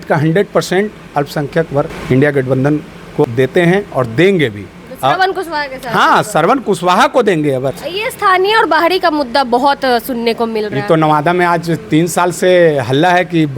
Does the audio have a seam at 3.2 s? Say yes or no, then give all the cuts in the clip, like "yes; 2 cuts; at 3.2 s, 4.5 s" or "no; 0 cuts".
yes; 3 cuts; at 2.0 s, 3.2 s, 7.8 s